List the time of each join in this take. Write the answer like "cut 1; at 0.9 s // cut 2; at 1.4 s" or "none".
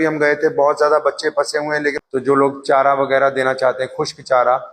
cut 1; at 2.0 s